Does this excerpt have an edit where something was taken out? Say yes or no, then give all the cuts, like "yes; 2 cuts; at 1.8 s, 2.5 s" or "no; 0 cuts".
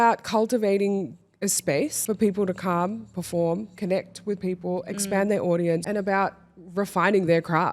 yes; 2 cuts; at 2.0 s, 5.8 s